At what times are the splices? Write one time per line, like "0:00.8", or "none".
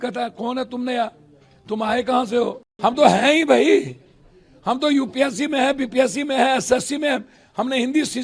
0:02.7